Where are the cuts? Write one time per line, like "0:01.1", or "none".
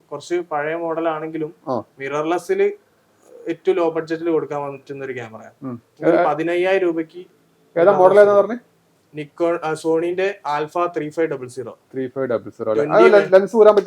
none